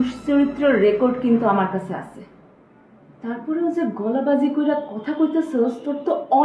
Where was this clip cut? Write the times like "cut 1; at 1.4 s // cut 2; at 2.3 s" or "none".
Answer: none